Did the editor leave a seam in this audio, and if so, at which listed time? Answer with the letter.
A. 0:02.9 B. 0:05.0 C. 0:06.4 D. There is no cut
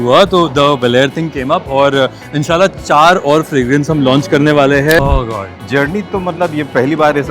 B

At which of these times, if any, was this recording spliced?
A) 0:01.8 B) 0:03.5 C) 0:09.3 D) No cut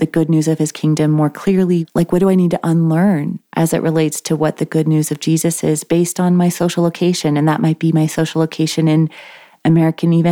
A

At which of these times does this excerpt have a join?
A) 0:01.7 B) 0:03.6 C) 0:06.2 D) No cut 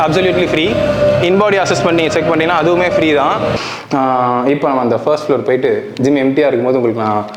B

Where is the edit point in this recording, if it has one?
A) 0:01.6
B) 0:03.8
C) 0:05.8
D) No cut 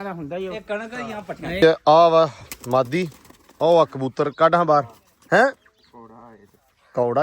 A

